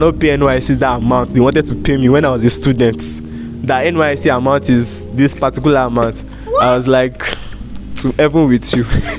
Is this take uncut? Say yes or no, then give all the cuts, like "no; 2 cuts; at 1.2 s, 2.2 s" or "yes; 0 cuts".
yes; 0 cuts